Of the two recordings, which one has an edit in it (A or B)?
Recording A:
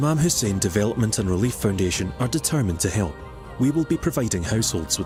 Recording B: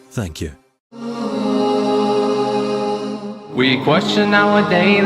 B